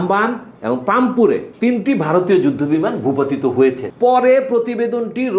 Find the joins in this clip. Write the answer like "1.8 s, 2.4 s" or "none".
1.5 s, 3.9 s